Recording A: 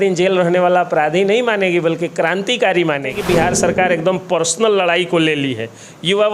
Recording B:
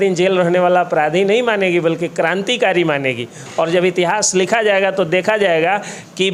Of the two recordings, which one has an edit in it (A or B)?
A